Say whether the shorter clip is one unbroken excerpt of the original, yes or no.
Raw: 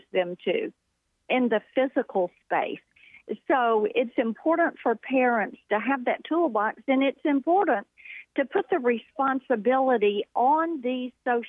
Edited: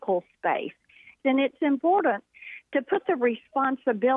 no